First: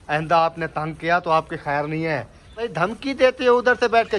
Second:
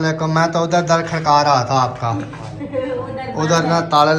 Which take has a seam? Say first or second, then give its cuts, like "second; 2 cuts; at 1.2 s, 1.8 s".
first; 1 cut; at 2.7 s